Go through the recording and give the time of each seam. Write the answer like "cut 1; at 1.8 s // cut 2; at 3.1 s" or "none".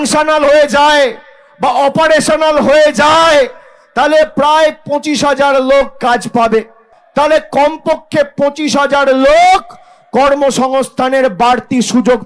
cut 1; at 7.0 s